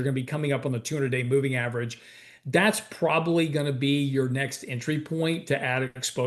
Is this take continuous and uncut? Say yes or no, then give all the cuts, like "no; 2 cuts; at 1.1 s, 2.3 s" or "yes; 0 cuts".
yes; 0 cuts